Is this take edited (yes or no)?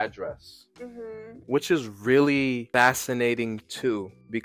yes